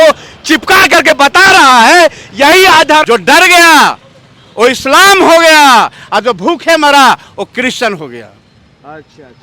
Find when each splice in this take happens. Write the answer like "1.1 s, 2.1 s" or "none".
3.0 s